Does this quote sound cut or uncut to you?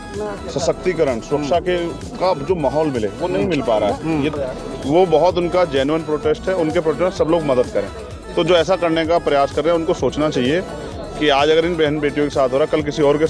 cut